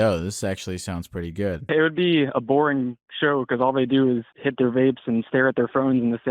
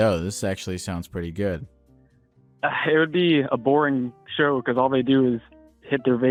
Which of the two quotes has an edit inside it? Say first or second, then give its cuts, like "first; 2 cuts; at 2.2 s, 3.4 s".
first; 2 cuts; at 1.6 s, 4.4 s